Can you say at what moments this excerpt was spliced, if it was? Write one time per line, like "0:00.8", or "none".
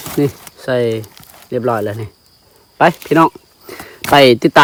none